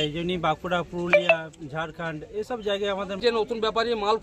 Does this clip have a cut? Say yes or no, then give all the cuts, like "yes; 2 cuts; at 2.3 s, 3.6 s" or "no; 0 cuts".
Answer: yes; 1 cut; at 3.2 s